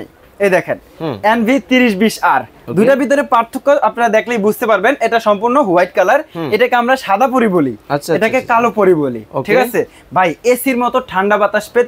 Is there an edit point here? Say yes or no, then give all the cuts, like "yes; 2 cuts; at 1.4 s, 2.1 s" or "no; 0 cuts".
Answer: no; 0 cuts